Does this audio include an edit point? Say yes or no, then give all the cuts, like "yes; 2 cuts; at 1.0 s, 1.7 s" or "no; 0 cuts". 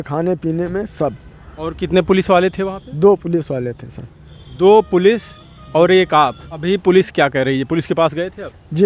yes; 1 cut; at 6.5 s